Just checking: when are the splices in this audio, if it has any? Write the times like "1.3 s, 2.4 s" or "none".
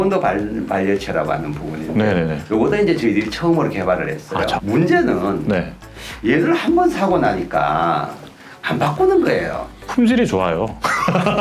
4.6 s